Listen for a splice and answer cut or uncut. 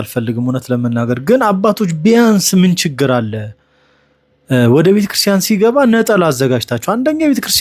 uncut